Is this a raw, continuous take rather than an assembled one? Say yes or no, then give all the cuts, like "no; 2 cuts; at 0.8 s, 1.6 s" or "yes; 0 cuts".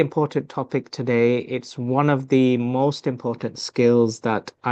yes; 0 cuts